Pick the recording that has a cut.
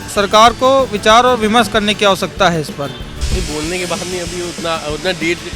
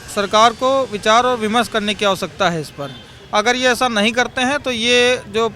first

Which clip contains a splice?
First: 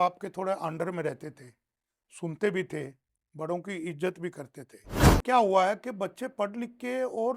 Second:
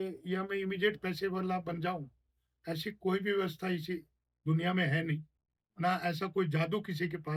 first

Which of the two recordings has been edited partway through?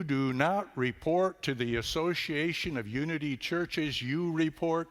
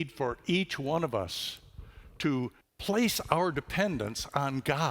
second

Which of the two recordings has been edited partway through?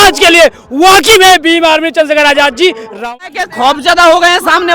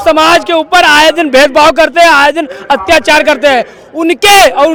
first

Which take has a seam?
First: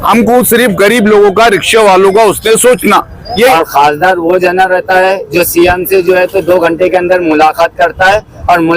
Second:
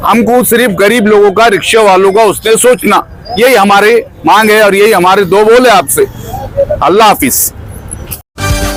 first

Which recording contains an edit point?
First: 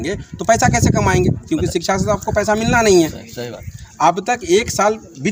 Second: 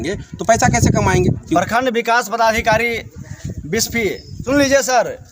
second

